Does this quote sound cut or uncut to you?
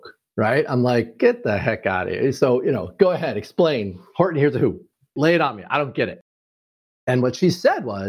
cut